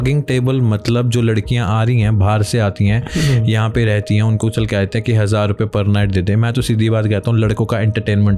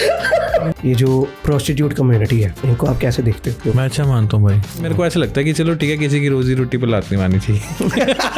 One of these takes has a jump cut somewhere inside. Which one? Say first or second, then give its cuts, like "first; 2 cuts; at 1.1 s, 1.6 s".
second; 5 cuts; at 0.7 s, 1.4 s, 2.5 s, 3.6 s, 4.8 s